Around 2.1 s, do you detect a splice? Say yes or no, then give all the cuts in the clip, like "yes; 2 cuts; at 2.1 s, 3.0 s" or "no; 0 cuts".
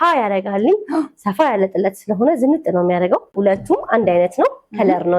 no; 1 cut; at 3.3 s